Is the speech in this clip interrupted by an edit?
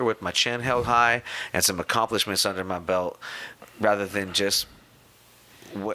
no; 0 cuts

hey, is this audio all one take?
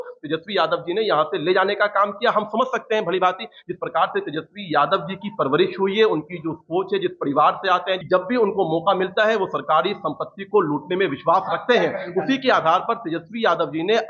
no; 1 cut; at 8.0 s

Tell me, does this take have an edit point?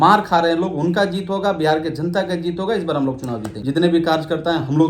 yes; 1 cut; at 3.5 s

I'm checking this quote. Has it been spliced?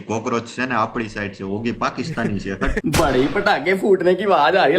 yes; 1 cut; at 2.8 s

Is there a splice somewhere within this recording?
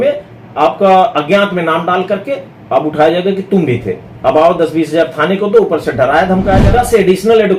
yes; 1 cut; at 6.7 s

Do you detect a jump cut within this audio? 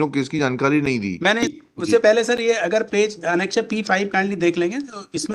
yes; 1 cut; at 1.5 s

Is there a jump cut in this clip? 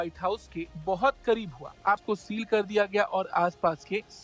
yes; 1 cut; at 2.0 s

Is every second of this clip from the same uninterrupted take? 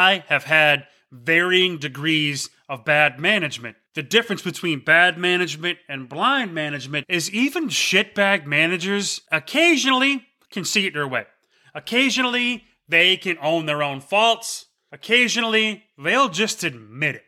yes; 0 cuts

